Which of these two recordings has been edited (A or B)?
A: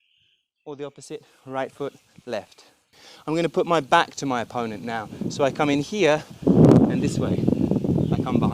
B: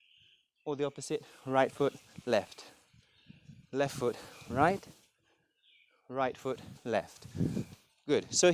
A